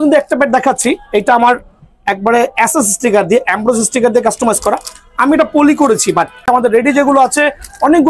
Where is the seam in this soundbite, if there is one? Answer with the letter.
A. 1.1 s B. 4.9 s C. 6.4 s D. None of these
C